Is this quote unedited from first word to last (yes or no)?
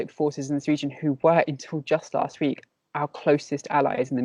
yes